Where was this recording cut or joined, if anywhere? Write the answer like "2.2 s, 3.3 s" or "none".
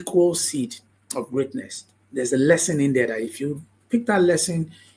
none